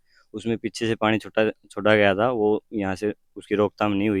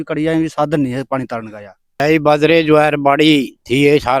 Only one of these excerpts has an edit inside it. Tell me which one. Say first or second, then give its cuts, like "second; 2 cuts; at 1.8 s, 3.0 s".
second; 1 cut; at 2.0 s